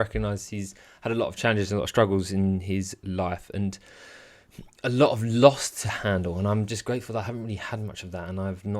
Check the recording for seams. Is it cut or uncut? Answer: uncut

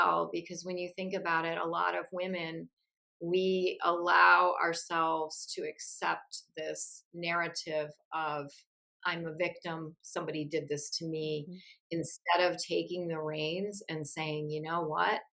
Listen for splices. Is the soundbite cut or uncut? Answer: uncut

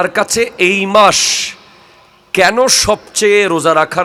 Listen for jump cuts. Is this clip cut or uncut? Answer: uncut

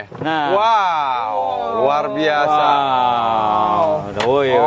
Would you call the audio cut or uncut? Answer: uncut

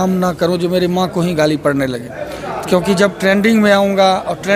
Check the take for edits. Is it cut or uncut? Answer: uncut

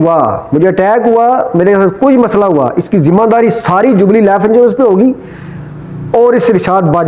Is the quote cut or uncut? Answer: uncut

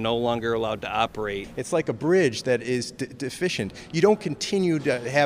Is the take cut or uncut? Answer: cut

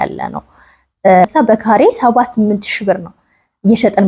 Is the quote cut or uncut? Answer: cut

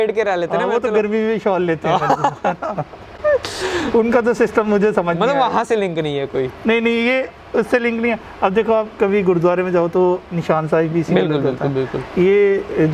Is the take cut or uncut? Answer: uncut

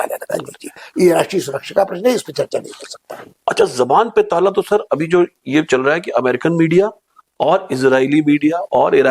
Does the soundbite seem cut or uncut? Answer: uncut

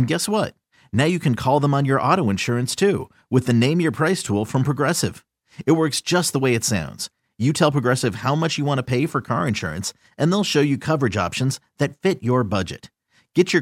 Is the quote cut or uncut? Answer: uncut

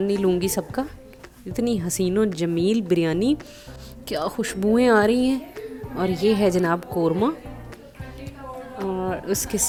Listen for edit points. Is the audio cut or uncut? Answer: uncut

